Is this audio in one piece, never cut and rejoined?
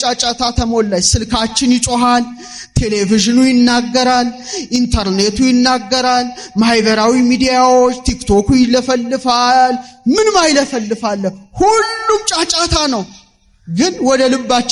yes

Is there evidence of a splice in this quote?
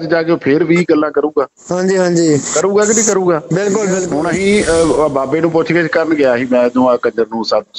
yes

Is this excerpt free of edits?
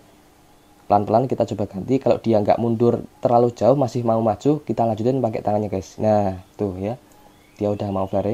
yes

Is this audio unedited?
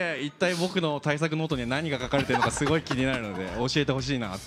yes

